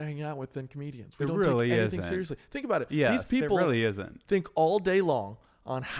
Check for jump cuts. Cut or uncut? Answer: uncut